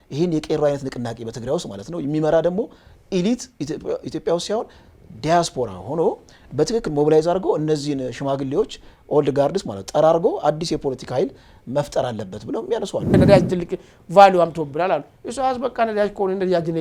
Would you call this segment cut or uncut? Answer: cut